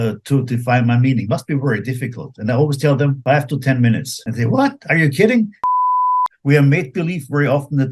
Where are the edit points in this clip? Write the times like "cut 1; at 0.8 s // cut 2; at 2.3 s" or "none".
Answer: cut 1; at 3.2 s // cut 2; at 4.2 s // cut 3; at 5.9 s

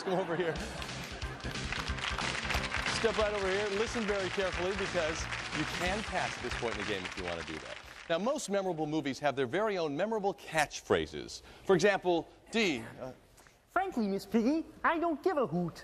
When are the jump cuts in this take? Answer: none

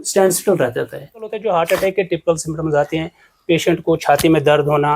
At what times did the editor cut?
cut 1; at 1.3 s

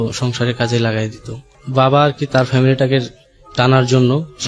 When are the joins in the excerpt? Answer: cut 1; at 1.6 s

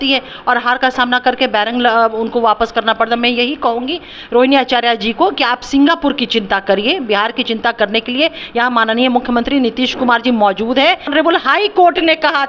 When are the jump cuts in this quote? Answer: cut 1; at 11.1 s

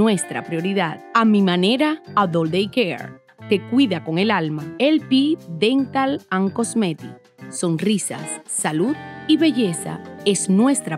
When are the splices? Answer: none

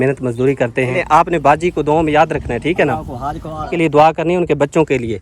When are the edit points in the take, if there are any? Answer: cut 1; at 1.0 s // cut 2; at 3.7 s

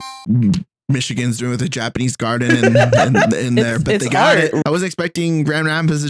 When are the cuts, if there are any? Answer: cut 1; at 4.6 s

